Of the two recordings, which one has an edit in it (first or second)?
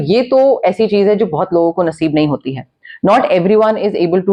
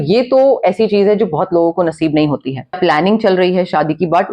second